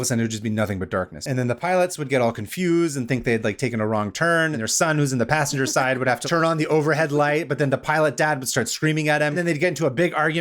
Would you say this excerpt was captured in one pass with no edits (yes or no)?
no